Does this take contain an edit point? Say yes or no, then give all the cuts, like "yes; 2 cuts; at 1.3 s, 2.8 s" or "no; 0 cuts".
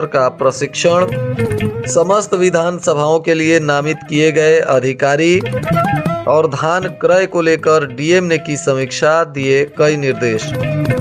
no; 0 cuts